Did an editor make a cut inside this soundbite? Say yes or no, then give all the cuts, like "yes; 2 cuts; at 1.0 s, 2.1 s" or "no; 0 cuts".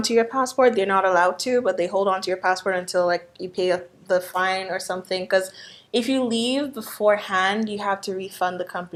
no; 0 cuts